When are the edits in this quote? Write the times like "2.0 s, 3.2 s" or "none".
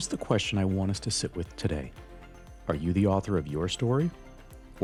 none